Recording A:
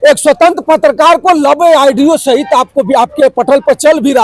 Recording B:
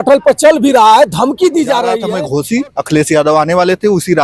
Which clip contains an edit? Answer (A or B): B